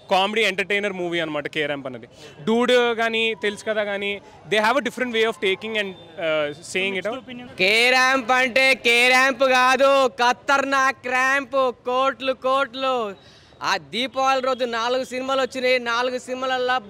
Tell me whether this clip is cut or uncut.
cut